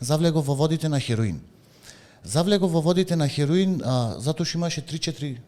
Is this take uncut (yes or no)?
yes